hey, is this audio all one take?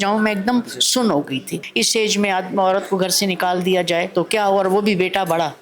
no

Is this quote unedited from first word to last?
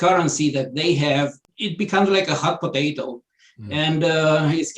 no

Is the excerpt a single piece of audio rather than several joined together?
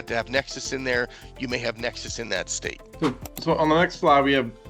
yes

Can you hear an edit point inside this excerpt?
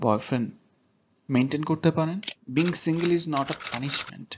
yes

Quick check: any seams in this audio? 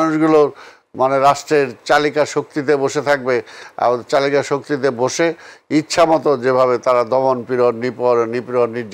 no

